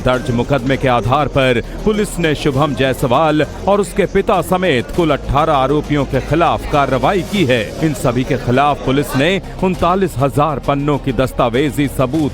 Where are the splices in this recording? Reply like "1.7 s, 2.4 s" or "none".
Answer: 3.0 s